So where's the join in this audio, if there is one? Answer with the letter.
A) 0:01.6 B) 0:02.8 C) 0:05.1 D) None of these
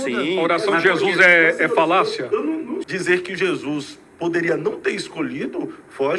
B